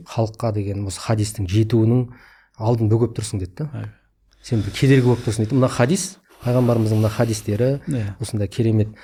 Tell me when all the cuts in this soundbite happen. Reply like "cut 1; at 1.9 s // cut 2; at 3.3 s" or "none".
none